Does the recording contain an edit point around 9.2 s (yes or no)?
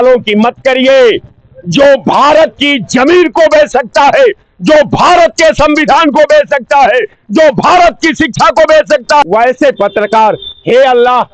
yes